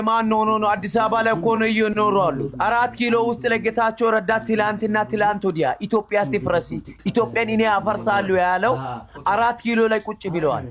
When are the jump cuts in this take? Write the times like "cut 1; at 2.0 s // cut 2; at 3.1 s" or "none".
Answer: none